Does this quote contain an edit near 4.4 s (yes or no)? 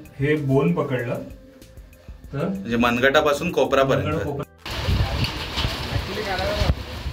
yes